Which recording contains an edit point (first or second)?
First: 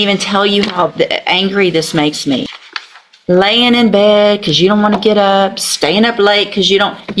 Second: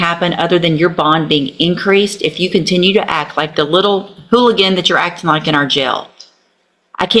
first